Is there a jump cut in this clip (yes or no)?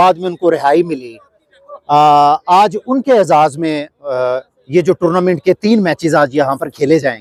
no